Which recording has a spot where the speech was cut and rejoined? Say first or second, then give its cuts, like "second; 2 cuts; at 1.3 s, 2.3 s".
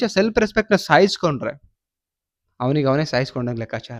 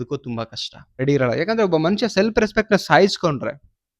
second; 1 cut; at 1.0 s